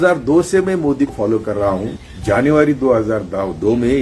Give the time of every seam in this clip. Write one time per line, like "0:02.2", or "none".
0:01.1